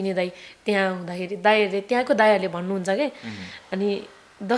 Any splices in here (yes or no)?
no